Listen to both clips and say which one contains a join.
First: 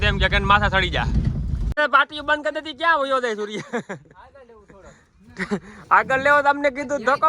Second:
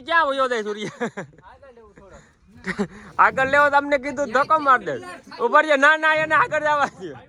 first; 1 cut; at 1.7 s

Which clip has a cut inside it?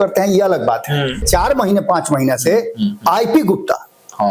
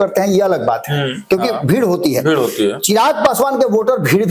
first; 1 cut; at 1.2 s

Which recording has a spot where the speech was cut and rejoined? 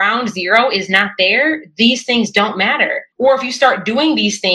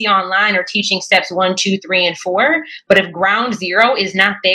first; 1 cut; at 3.0 s

